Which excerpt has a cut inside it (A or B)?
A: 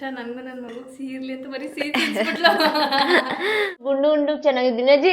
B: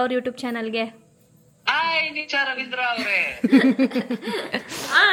A